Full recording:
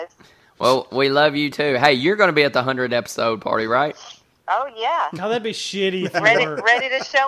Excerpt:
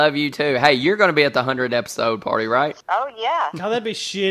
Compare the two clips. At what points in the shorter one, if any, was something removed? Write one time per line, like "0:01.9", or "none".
0:02.8